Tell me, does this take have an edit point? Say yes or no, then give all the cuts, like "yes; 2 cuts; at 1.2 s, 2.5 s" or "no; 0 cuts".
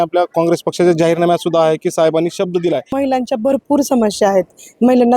yes; 1 cut; at 3.0 s